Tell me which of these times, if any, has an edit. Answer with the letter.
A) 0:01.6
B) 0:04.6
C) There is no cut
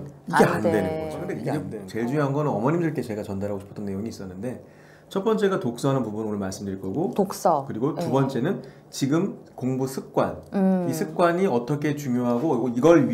A